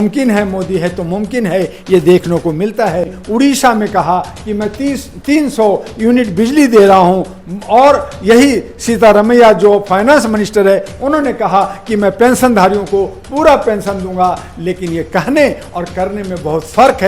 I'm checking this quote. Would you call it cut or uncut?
cut